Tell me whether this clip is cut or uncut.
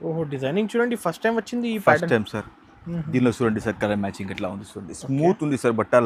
uncut